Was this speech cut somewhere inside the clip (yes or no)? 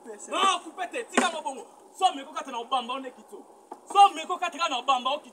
no